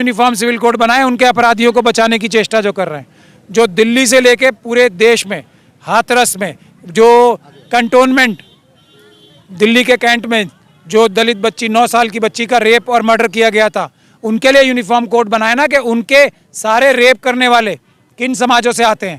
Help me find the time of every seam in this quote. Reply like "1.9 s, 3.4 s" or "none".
none